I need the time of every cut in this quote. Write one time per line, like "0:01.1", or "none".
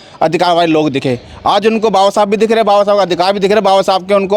none